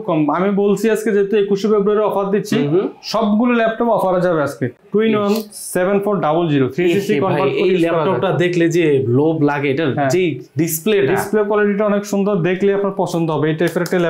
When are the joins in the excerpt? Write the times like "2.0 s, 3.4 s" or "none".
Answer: 4.7 s